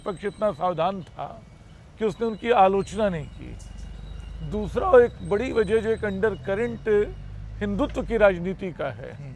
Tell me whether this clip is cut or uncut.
uncut